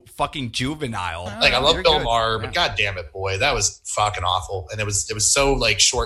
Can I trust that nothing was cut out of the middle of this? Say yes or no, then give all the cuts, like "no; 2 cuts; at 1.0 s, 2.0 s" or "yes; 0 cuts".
no; 1 cut; at 1.3 s